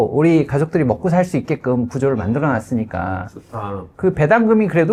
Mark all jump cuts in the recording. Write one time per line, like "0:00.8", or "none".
none